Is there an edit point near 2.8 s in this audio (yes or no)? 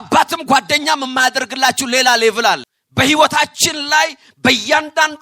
yes